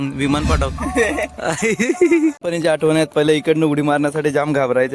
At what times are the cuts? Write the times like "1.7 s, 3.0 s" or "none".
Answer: 2.4 s

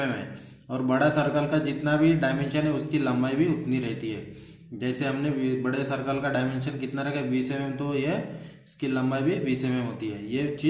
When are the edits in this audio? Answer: none

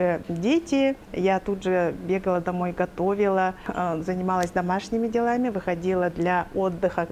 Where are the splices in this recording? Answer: 1.1 s, 3.6 s

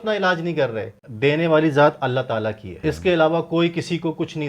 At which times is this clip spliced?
1.0 s, 2.7 s

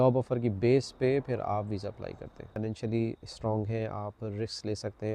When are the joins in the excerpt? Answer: 2.5 s

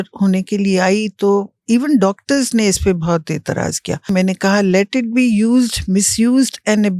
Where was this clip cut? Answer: 4.1 s

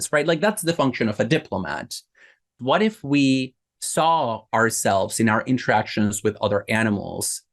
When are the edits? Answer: 2.6 s

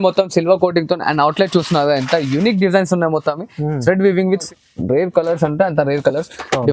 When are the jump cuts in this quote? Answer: 4.5 s

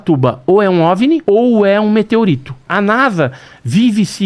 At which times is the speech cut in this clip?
1.2 s, 2.7 s

